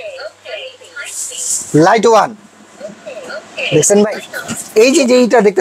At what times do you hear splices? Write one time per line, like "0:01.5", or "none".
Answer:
0:04.6